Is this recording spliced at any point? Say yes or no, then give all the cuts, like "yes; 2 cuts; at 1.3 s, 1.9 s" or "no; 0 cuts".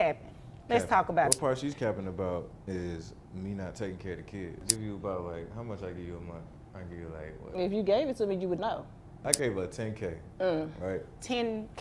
yes; 3 cuts; at 1.3 s, 4.6 s, 9.2 s